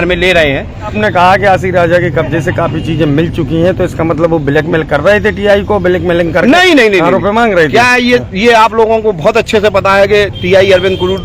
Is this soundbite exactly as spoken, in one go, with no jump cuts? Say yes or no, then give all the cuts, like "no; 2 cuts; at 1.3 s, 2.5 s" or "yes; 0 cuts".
no; 1 cut; at 1.0 s